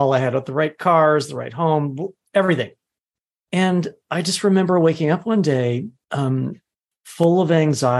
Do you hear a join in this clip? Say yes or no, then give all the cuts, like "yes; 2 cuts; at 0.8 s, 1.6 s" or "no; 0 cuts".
yes; 1 cut; at 6.0 s